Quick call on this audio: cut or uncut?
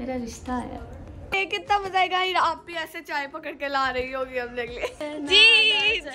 cut